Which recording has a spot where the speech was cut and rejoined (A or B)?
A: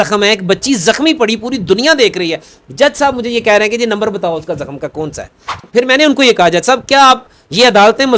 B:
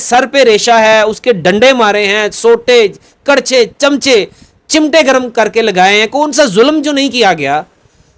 A